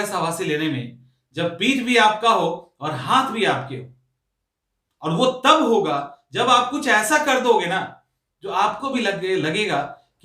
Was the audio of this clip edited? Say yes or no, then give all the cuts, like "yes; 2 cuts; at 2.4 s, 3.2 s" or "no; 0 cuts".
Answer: no; 0 cuts